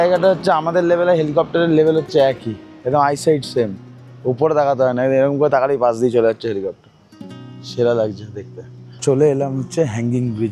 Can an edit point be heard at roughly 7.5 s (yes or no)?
no